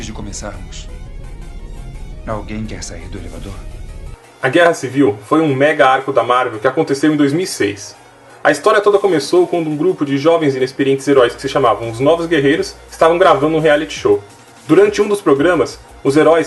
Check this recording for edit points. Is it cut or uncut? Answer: uncut